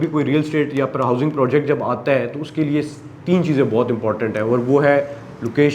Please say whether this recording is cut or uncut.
uncut